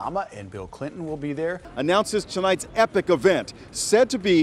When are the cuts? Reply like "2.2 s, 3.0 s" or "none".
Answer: 1.6 s